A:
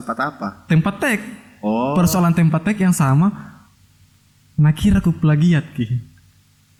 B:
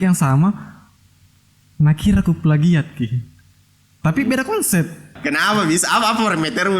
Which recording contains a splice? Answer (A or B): B